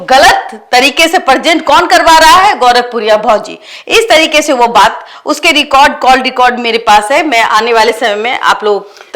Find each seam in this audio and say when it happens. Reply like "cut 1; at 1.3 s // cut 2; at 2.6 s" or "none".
none